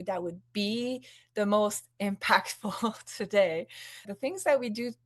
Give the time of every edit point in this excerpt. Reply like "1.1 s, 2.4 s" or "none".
4.1 s